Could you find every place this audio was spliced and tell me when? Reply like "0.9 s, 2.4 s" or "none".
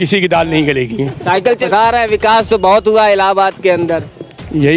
1.6 s